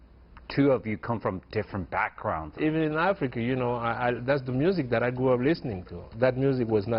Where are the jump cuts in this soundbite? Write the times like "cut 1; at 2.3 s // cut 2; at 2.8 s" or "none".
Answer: cut 1; at 2.6 s // cut 2; at 6.1 s